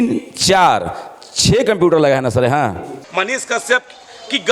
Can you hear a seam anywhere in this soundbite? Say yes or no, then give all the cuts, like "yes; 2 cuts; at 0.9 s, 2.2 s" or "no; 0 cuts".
yes; 1 cut; at 3.0 s